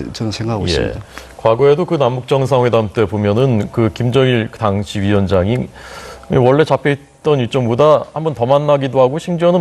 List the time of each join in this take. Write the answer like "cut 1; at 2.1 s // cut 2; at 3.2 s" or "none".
none

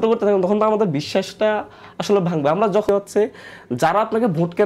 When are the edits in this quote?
cut 1; at 2.9 s

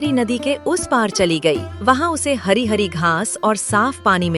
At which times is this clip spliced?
cut 1; at 1.7 s

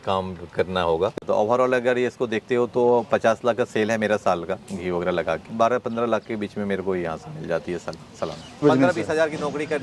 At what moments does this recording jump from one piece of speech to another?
cut 1; at 1.2 s // cut 2; at 5.5 s // cut 3; at 8.6 s

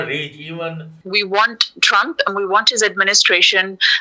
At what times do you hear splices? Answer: cut 1; at 0.9 s

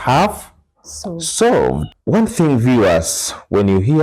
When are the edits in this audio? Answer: cut 1; at 1.9 s

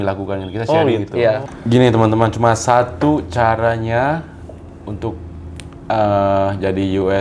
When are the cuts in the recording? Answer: cut 1; at 1.5 s

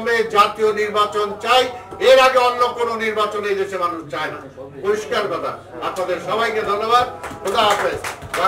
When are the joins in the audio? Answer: none

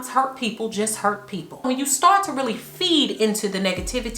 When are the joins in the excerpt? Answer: cut 1; at 1.6 s

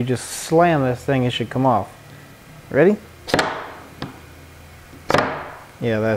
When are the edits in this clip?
none

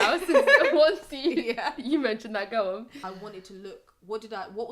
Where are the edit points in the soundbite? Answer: cut 1; at 3.0 s

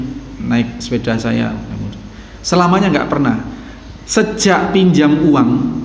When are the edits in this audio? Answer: none

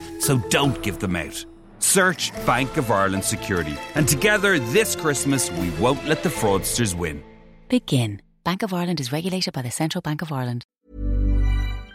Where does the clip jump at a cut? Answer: cut 1; at 10.8 s

